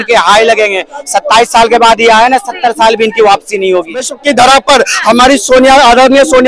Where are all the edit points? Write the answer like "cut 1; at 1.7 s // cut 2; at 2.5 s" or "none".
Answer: cut 1; at 4.1 s